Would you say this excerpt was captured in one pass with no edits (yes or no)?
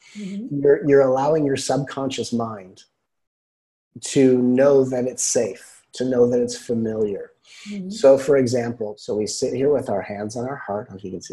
no